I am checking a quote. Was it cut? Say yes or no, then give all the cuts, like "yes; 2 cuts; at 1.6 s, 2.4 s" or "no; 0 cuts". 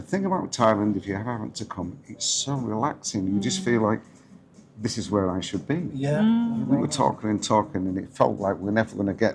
yes; 1 cut; at 6.7 s